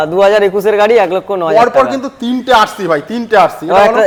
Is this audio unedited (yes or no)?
yes